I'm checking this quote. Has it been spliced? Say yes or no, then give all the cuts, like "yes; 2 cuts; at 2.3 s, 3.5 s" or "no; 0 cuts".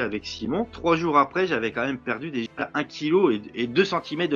no; 0 cuts